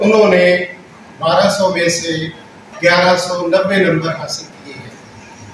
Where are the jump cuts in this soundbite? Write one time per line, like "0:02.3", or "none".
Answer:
none